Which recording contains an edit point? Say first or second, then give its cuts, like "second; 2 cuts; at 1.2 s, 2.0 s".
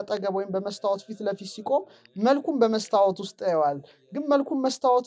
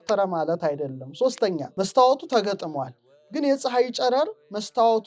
second; 1 cut; at 1.7 s